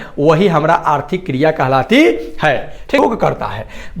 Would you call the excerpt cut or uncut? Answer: cut